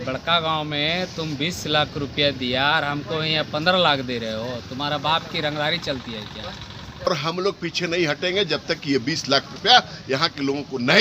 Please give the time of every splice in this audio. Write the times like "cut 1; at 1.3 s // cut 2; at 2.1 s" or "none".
cut 1; at 7.1 s